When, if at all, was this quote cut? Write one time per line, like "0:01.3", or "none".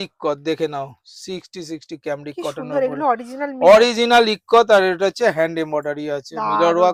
none